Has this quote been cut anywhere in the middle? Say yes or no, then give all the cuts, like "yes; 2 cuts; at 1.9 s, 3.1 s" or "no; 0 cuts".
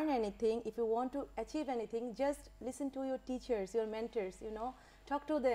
no; 0 cuts